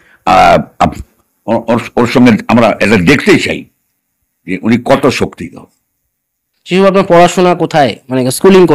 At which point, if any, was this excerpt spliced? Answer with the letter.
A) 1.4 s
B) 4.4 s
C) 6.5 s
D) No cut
C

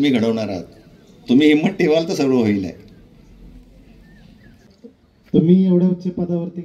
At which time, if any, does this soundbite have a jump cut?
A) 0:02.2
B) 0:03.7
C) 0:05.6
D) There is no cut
D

